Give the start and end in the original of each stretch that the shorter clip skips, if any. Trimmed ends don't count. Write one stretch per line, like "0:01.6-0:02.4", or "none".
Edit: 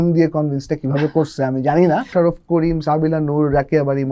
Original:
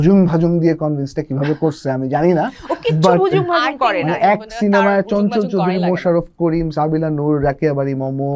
0:02.6-0:06.0